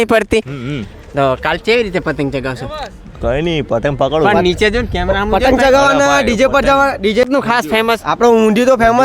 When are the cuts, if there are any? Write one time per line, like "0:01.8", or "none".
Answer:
0:07.2